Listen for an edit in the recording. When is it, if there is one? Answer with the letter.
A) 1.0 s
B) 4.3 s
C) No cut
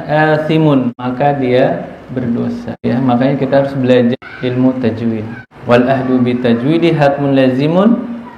A